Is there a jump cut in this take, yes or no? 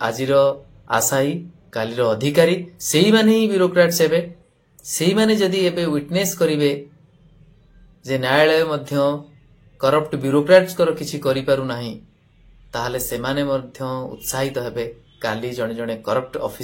no